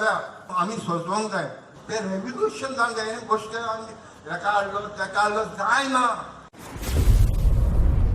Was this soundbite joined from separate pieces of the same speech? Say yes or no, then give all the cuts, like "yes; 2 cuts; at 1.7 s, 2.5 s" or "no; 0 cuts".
yes; 1 cut; at 6.5 s